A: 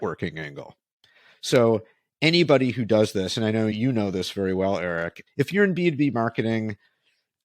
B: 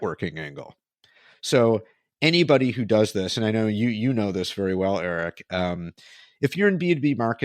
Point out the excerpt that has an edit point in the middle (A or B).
A